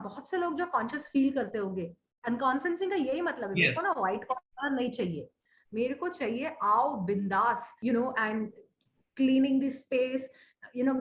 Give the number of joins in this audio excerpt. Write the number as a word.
one